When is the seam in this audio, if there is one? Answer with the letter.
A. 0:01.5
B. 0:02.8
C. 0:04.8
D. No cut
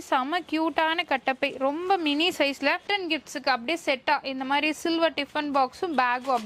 B